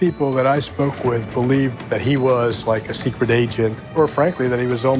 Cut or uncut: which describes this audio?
cut